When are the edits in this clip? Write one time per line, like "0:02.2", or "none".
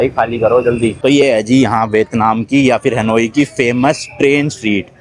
0:01.0